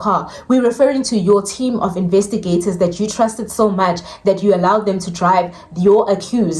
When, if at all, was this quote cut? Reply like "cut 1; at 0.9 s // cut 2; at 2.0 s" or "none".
none